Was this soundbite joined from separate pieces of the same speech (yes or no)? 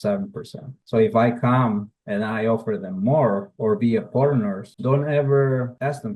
yes